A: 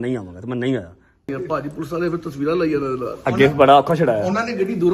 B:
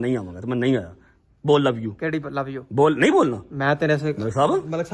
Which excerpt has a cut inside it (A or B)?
A